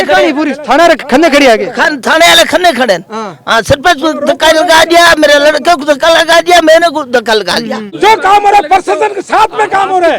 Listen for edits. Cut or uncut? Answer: cut